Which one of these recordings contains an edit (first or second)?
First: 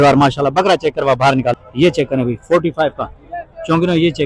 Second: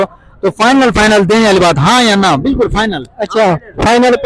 first